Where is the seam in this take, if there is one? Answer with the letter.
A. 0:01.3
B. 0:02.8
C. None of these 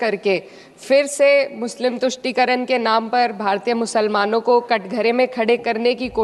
C